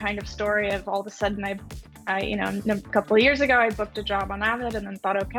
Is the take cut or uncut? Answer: uncut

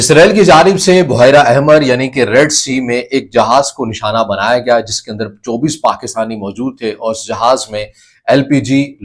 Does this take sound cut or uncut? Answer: uncut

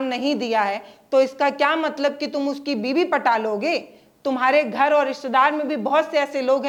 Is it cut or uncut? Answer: uncut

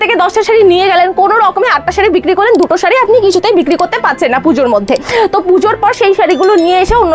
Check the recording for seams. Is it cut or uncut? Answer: uncut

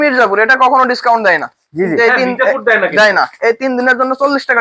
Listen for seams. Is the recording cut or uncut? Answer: uncut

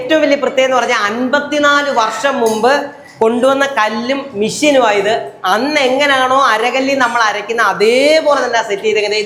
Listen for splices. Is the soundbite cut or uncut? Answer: uncut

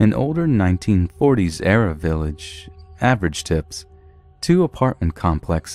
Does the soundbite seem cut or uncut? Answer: cut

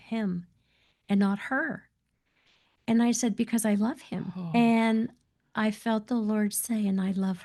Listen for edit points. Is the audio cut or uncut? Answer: uncut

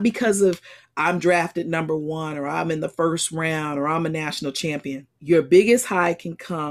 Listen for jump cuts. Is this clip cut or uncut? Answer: cut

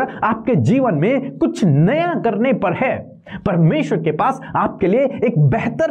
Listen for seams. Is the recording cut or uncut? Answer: uncut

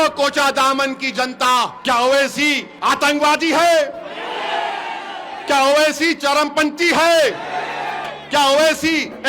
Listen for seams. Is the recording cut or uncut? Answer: cut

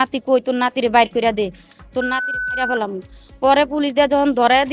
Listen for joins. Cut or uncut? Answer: uncut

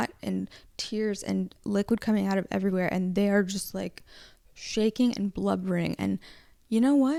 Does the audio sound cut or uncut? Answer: uncut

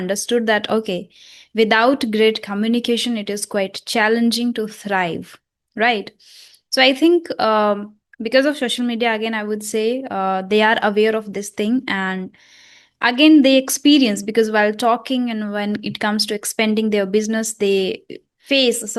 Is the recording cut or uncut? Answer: uncut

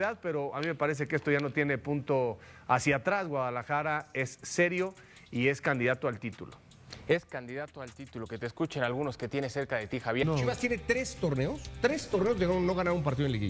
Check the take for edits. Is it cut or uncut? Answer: cut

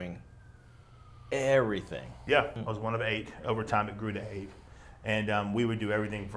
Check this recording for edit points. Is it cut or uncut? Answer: cut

